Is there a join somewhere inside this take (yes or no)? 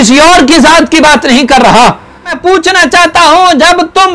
yes